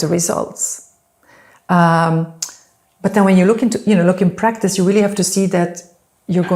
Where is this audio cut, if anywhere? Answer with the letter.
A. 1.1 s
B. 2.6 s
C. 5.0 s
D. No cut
D